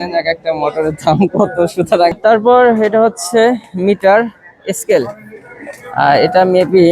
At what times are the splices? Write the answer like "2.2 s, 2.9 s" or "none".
2.1 s